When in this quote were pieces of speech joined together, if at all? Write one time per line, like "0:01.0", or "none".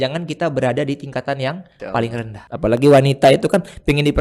0:02.4